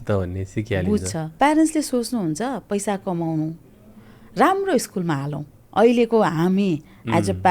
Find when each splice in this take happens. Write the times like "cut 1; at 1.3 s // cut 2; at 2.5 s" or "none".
cut 1; at 1.2 s